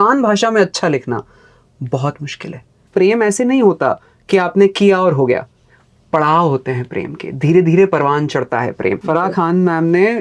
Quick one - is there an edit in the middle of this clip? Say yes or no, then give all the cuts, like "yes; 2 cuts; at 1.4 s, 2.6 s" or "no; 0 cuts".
yes; 2 cuts; at 2.8 s, 9.0 s